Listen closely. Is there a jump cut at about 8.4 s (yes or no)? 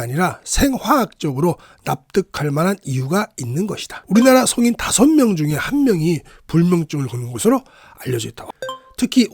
yes